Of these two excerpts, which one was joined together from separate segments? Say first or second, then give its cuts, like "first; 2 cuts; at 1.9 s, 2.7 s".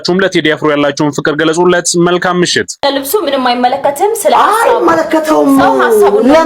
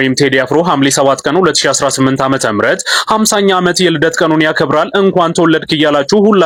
first; 1 cut; at 2.7 s